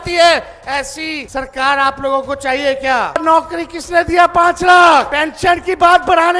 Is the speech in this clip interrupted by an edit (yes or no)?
yes